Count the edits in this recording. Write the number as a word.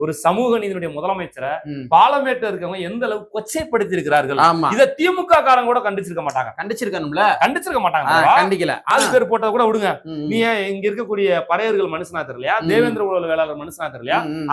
one